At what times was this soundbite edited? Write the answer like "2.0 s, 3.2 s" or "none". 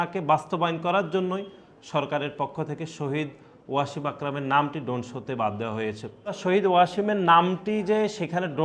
6.4 s

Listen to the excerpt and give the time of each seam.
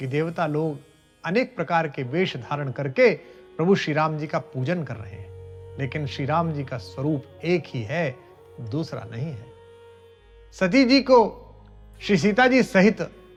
none

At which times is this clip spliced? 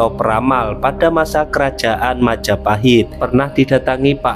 3.2 s

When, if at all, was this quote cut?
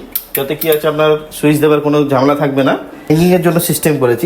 3.1 s

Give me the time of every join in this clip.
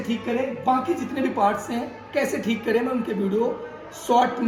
none

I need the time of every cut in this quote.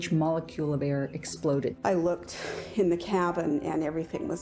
1.7 s

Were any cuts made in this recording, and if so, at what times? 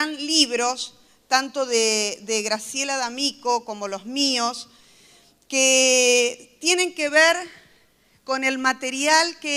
2.8 s

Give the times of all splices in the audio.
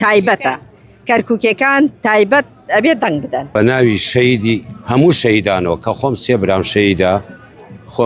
3.5 s

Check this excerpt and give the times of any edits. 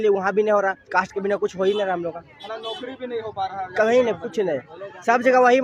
none

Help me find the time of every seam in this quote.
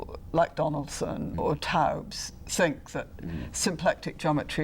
1.3 s

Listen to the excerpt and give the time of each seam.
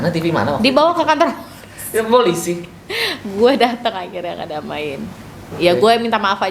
none

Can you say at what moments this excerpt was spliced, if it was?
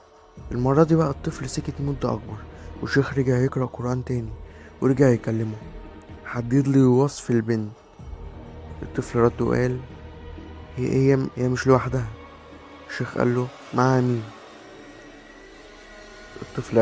11.3 s

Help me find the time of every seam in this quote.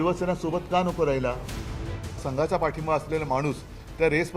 1.7 s

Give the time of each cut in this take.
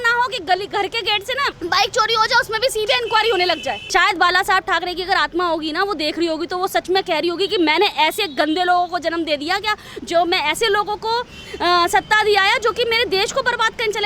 3.8 s

